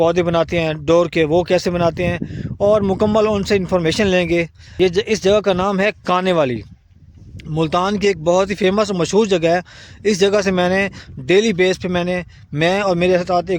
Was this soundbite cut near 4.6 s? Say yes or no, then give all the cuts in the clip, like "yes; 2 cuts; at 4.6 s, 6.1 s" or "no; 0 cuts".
yes; 1 cut; at 4.6 s